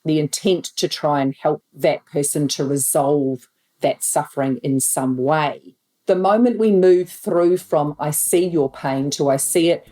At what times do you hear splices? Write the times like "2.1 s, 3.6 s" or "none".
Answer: 5.9 s